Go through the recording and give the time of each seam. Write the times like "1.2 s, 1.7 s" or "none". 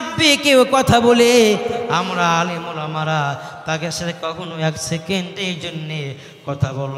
none